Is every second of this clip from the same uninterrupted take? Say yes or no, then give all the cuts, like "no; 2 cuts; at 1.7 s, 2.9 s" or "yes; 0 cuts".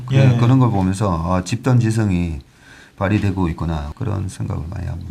no; 1 cut; at 3.9 s